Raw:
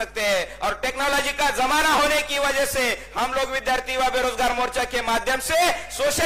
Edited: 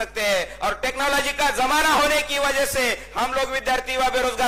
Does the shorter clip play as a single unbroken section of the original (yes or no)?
yes